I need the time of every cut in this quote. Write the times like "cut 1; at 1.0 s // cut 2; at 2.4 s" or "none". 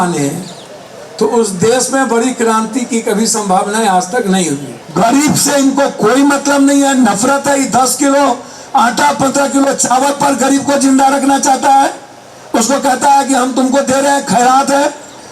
cut 1; at 4.7 s